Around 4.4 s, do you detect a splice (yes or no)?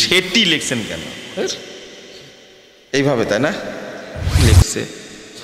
yes